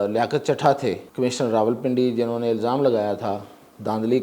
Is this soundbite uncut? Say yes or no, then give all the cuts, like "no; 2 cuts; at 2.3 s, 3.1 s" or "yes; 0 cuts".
no; 1 cut; at 1.1 s